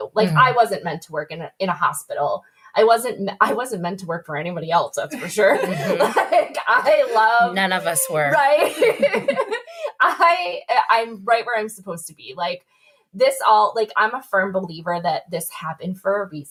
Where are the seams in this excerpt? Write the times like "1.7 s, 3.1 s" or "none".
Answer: none